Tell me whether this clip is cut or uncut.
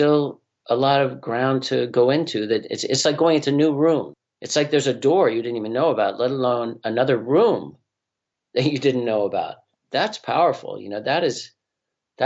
cut